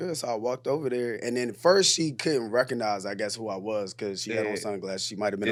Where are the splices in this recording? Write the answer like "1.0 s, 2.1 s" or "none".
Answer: none